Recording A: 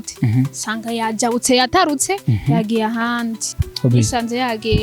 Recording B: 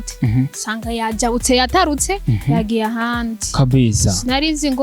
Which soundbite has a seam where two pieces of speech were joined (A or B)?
A